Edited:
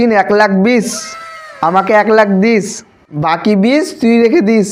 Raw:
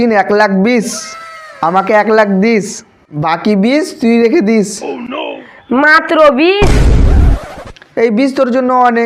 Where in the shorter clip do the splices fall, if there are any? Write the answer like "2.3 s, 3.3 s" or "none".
none